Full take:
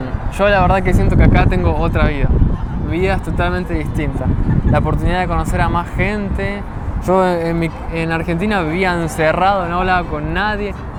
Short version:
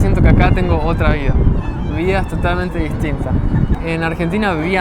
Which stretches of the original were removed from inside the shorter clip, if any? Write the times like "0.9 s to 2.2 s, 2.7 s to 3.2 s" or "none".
4.7 s to 7.8 s